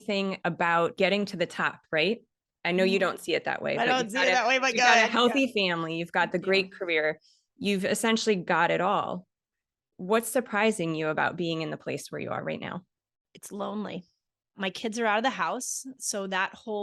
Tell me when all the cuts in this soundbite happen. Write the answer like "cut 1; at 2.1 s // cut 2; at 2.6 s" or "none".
cut 1; at 0.9 s